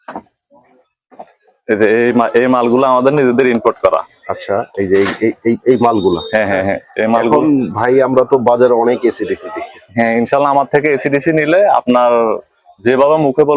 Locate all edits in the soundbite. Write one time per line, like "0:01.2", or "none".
none